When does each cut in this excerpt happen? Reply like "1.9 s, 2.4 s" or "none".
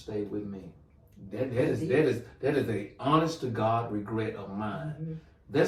none